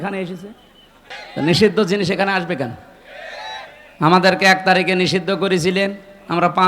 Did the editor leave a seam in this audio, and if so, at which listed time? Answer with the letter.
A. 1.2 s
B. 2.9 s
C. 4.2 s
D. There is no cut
A